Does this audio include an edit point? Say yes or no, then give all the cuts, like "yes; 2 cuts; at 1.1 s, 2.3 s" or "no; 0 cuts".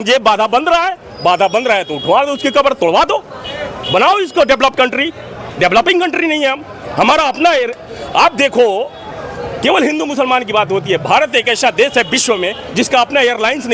no; 0 cuts